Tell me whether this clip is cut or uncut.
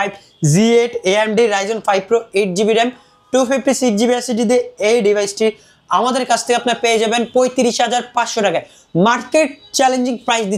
uncut